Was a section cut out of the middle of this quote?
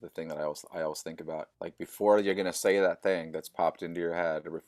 no; 0 cuts

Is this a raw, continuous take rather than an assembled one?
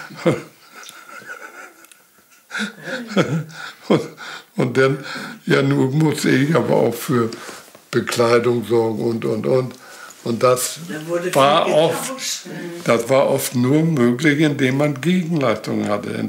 yes; 0 cuts

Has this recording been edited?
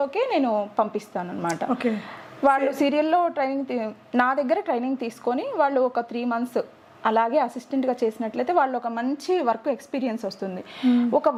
no; 0 cuts

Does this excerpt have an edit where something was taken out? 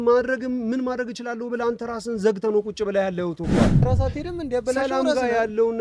yes; 1 cut; at 3.8 s

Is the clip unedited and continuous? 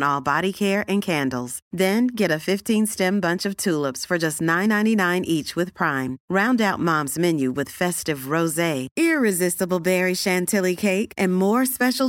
yes; 0 cuts

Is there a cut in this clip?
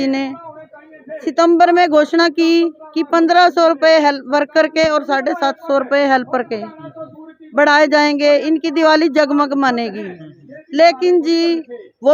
no; 0 cuts

